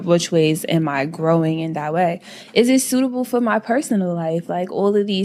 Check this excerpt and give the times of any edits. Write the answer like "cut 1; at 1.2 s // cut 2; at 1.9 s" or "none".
none